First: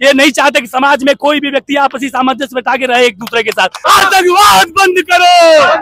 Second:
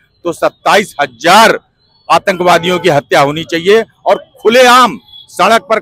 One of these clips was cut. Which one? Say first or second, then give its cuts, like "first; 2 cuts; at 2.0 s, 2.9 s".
first; 1 cut; at 3.8 s